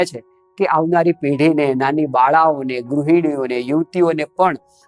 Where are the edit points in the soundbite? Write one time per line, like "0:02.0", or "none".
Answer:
none